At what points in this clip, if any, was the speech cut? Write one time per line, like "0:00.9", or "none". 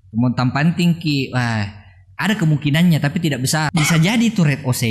0:03.7